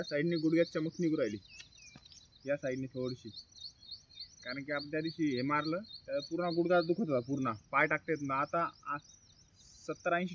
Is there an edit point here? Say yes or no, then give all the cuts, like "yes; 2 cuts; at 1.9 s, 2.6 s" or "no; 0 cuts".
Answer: no; 0 cuts